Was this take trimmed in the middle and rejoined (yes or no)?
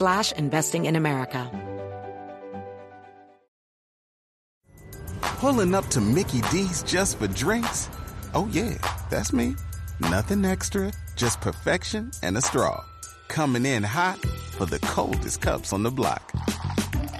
yes